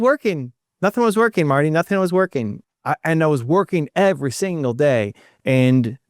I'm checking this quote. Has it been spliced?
yes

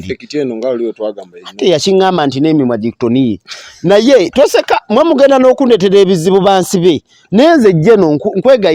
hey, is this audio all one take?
yes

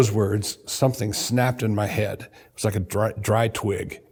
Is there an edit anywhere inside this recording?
no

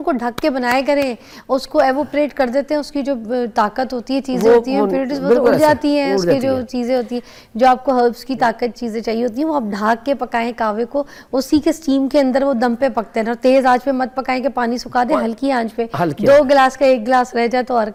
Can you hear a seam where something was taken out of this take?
no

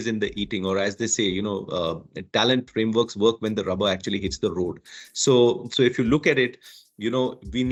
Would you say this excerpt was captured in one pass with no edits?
yes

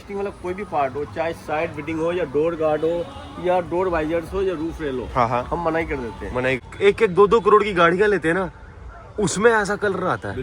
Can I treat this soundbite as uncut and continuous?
no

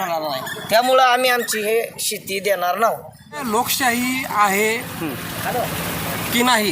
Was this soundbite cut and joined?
yes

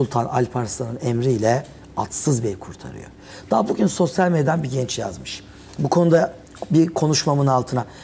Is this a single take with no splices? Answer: yes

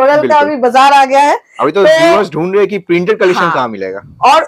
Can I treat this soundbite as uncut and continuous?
yes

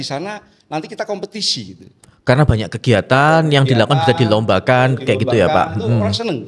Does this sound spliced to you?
no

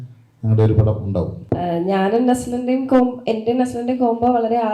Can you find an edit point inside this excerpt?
yes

